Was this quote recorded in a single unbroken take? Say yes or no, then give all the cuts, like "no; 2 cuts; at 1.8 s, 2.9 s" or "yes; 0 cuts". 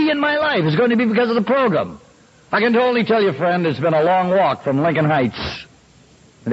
yes; 0 cuts